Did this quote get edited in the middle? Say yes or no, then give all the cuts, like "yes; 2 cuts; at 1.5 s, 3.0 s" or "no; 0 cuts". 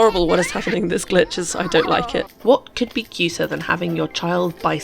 yes; 1 cut; at 2.3 s